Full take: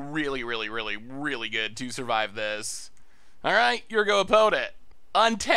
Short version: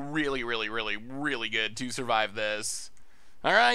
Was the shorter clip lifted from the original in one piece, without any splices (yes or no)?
yes